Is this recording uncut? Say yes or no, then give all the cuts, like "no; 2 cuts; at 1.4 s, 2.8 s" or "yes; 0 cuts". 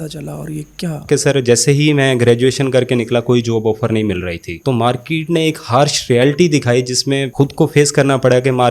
no; 2 cuts; at 1.1 s, 4.5 s